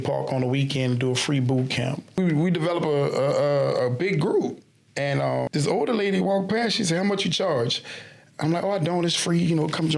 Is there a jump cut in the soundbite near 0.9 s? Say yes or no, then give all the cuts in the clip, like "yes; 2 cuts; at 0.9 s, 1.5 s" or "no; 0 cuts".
no; 2 cuts; at 2.2 s, 5.5 s